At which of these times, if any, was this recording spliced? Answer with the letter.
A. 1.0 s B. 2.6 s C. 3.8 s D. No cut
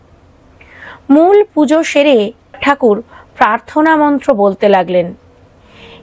B